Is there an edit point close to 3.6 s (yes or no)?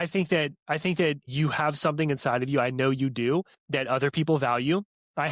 yes